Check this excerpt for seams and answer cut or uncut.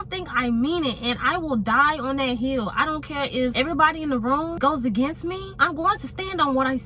cut